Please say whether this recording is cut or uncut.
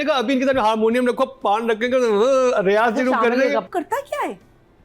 cut